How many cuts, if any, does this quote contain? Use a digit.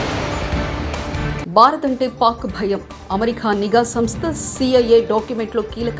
1